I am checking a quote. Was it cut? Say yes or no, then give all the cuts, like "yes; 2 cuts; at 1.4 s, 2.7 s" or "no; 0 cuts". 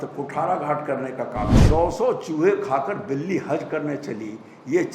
yes; 1 cut; at 1.6 s